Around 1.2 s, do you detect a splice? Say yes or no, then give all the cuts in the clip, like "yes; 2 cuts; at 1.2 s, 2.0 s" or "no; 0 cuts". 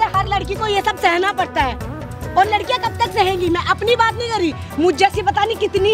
no; 0 cuts